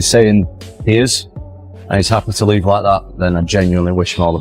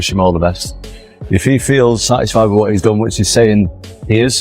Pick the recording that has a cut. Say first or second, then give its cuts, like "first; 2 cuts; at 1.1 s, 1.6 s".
second; 1 cut; at 2.0 s